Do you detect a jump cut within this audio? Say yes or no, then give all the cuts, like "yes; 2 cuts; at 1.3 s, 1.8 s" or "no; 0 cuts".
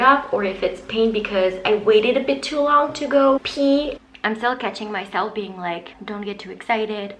yes; 2 cuts; at 3.9 s, 5.9 s